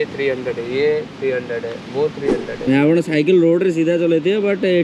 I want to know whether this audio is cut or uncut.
cut